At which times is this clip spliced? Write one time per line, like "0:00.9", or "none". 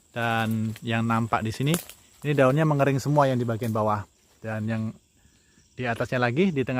none